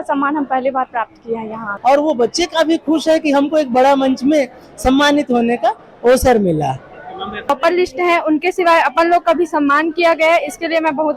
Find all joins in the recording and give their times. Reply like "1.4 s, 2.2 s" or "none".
1.7 s, 7.5 s

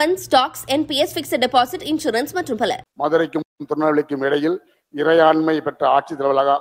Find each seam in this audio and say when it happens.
2.8 s

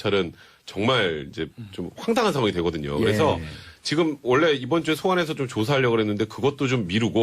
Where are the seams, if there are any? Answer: 6.1 s

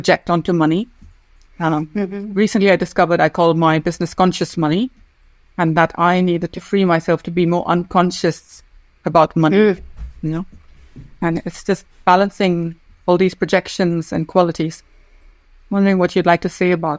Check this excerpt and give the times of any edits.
none

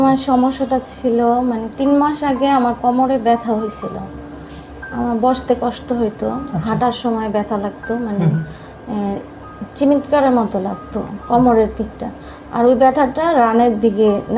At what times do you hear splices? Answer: none

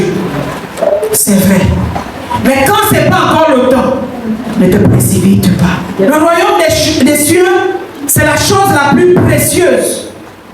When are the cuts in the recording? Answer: 6.1 s

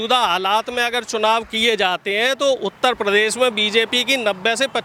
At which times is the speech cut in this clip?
none

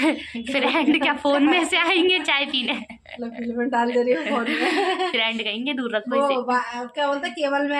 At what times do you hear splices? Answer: none

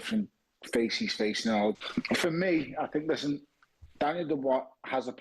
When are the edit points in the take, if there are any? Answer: 1.8 s

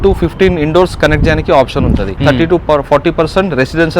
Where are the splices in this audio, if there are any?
2.2 s

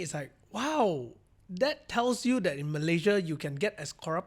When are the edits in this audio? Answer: none

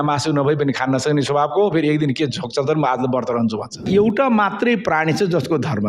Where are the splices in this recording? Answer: 3.8 s

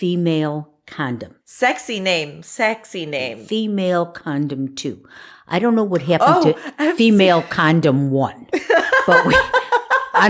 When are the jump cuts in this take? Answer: 1.5 s, 3.4 s

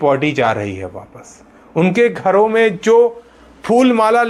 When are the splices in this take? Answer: none

